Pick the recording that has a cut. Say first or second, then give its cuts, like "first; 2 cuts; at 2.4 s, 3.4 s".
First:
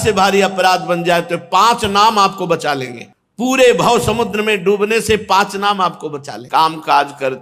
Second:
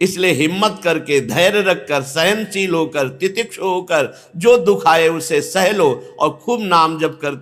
first; 1 cut; at 6.4 s